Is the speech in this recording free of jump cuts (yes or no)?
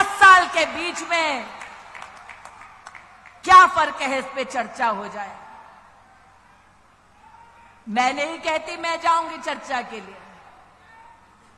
yes